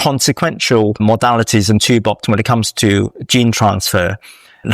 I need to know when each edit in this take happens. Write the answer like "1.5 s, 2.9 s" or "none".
1.0 s